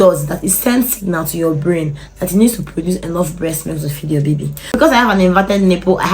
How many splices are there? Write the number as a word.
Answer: one